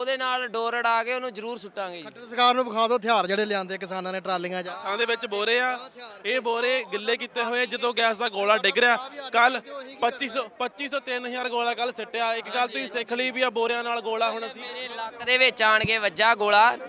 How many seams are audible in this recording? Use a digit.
1